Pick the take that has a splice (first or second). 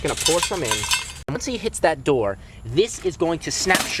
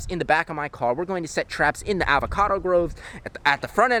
first